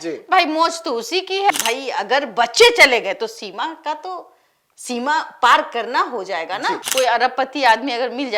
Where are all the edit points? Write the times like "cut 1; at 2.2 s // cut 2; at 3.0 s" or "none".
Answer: cut 1; at 1.5 s // cut 2; at 6.8 s